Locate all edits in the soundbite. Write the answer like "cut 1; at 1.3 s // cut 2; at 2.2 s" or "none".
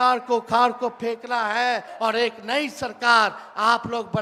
cut 1; at 1.9 s